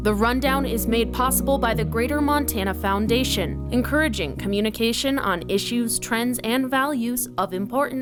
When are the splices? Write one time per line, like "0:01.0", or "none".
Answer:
none